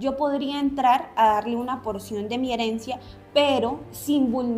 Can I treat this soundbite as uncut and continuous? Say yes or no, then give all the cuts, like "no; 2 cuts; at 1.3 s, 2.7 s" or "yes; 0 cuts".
yes; 0 cuts